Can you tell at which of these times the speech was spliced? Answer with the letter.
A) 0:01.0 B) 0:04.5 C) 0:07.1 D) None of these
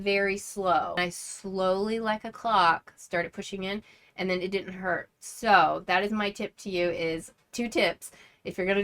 A